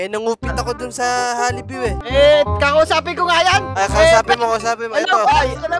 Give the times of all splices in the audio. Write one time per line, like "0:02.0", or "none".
0:02.0